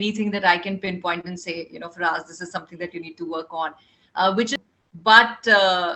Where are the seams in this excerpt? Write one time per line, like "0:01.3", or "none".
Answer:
0:04.5